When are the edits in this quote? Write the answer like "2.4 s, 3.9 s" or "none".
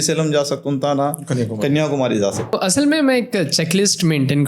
2.4 s